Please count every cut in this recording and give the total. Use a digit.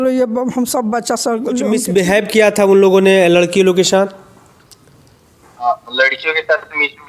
1